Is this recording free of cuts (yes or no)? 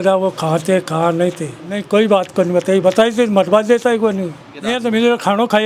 no